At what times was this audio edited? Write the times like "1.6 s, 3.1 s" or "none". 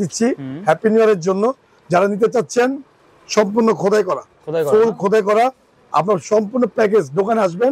none